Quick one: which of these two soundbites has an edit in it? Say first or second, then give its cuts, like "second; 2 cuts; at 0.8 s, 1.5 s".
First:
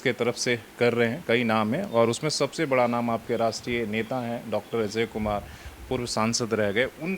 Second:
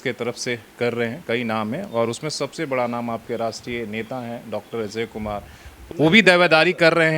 second; 1 cut; at 5.9 s